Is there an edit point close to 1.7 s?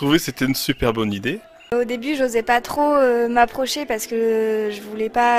yes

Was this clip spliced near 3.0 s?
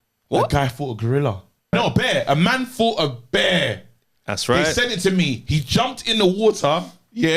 no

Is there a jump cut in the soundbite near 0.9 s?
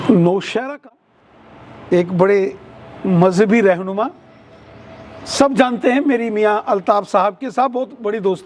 yes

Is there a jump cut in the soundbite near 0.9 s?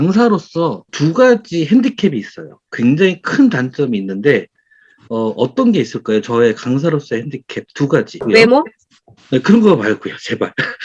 yes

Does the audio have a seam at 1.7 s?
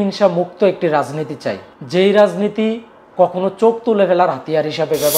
yes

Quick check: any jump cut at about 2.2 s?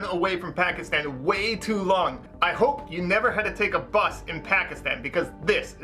yes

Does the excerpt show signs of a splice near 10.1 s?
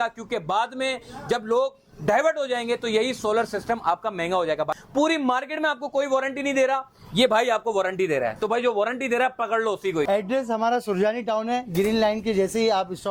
yes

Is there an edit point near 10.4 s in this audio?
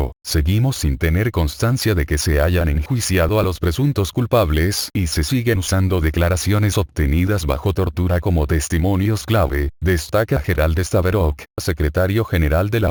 no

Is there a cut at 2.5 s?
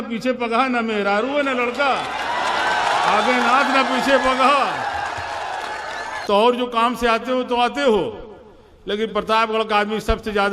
no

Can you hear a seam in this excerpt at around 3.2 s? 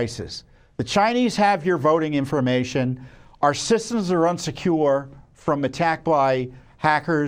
no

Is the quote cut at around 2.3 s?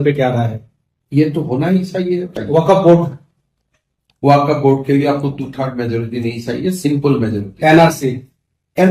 yes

